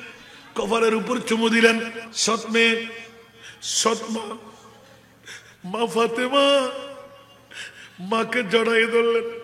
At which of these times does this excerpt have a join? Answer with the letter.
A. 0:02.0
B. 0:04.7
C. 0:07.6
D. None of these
A